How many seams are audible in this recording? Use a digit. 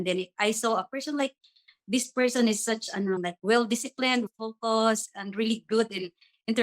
1